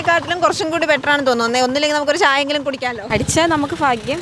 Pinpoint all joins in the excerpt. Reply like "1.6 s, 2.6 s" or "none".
3.0 s